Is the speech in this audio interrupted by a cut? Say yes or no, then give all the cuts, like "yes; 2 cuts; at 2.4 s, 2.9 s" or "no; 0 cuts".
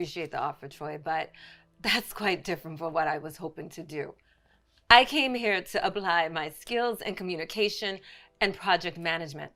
no; 0 cuts